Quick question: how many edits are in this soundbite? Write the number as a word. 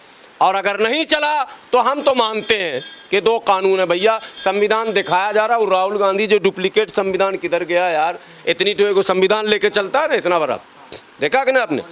zero